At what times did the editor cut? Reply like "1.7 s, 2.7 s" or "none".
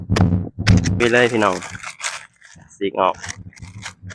1.0 s